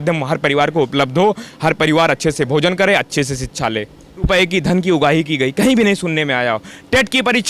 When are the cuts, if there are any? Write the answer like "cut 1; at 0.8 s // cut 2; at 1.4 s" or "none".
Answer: cut 1; at 4.3 s